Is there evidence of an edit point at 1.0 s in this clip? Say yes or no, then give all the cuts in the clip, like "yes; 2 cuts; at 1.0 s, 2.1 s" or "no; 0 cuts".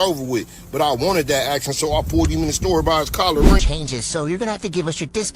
no; 1 cut; at 3.6 s